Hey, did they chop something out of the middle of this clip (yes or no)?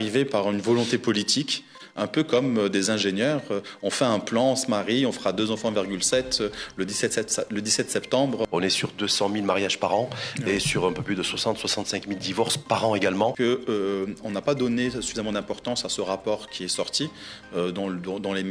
yes